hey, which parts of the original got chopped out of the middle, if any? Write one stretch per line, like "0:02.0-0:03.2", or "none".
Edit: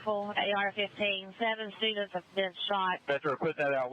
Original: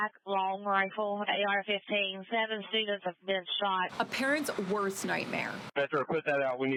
0:03.9-0:05.7